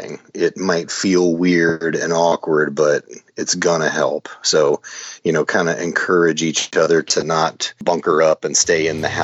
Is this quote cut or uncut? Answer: cut